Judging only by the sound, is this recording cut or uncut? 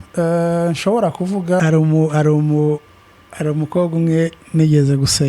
cut